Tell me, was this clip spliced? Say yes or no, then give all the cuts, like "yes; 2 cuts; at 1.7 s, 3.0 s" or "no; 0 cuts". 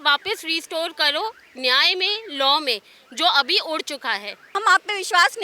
yes; 1 cut; at 4.3 s